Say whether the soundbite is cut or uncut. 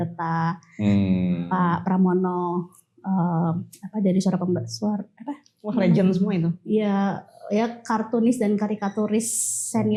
uncut